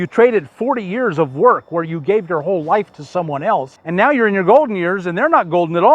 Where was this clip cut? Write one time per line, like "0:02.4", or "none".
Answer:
0:03.8